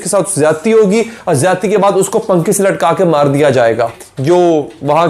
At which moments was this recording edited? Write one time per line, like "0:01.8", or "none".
0:04.1

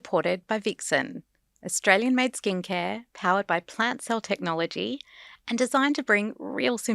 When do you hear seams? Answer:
none

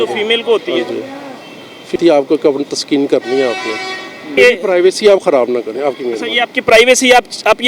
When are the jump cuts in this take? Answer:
0:01.9
0:04.3

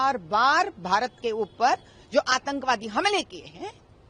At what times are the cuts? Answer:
none

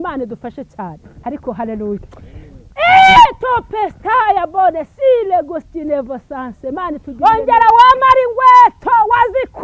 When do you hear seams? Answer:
0:01.1
0:07.1

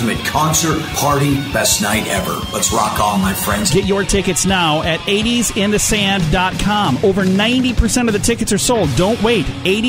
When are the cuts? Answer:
none

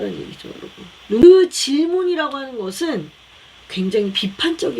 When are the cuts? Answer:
0:01.2

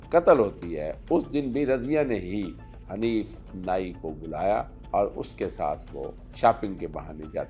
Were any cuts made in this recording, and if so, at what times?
0:04.8
0:06.2

